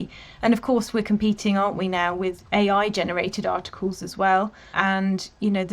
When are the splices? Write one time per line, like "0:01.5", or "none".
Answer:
0:04.7